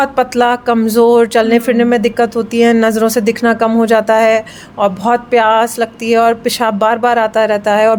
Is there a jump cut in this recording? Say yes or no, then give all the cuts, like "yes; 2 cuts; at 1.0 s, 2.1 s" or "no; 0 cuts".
no; 0 cuts